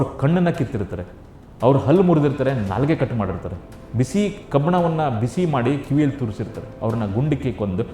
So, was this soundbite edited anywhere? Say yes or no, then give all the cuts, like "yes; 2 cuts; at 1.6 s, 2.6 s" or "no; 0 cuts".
yes; 1 cut; at 6.7 s